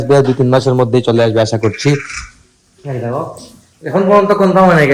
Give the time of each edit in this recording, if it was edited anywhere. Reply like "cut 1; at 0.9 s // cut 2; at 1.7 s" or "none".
none